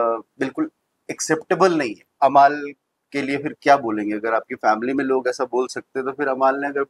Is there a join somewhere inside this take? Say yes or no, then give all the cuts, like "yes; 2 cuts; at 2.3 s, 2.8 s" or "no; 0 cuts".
yes; 1 cut; at 2.2 s